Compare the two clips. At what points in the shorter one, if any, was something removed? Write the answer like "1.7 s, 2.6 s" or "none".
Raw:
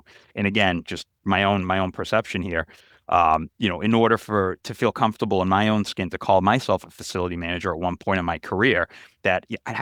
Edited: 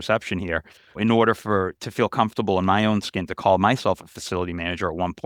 0.9 s